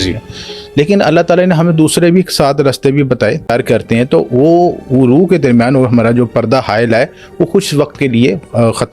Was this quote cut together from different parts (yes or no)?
yes